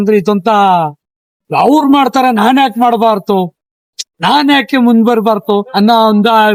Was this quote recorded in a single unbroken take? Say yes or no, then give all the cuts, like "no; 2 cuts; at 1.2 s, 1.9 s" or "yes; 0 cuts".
yes; 0 cuts